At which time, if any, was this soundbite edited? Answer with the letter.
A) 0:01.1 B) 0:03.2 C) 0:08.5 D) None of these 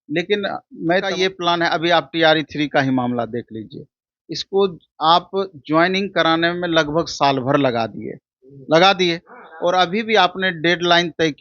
A